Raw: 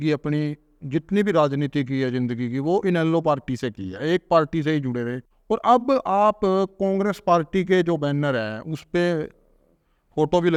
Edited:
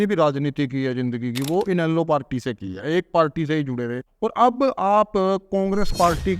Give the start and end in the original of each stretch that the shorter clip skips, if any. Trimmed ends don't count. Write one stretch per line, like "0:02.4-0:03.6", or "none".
0:05.2-0:05.3